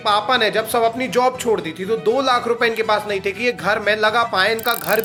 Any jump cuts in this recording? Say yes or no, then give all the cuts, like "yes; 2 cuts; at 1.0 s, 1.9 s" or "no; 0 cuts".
no; 0 cuts